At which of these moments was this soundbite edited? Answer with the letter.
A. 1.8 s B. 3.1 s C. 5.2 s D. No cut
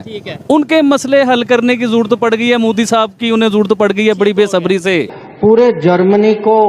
C